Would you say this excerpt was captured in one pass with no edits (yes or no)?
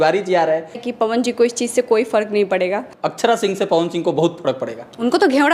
no